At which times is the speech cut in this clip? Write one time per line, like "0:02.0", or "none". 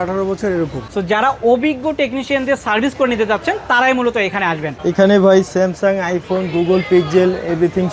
0:00.9
0:04.7